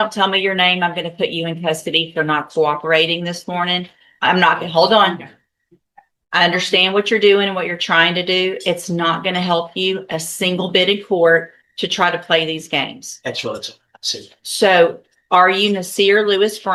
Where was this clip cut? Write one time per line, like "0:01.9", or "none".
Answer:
none